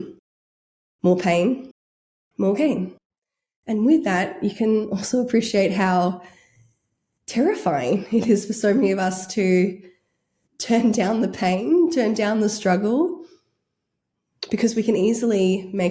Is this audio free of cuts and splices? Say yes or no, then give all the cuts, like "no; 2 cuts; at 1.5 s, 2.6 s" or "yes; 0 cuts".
yes; 0 cuts